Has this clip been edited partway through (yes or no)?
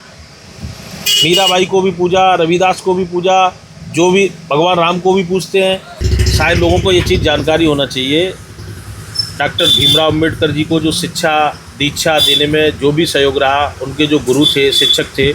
yes